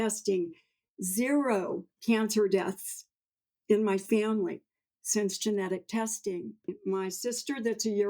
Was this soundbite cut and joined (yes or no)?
yes